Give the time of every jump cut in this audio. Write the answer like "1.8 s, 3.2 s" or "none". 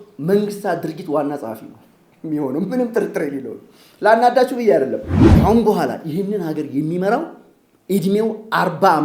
5.1 s